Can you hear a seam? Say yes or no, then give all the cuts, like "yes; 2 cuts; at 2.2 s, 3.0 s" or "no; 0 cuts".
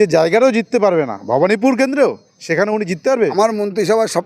yes; 1 cut; at 3.3 s